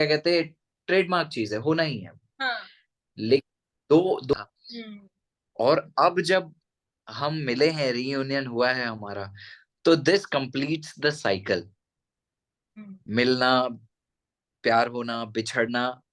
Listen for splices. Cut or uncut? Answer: cut